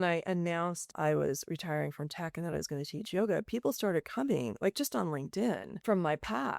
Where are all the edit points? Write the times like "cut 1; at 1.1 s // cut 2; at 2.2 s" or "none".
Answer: cut 1; at 0.9 s // cut 2; at 5.9 s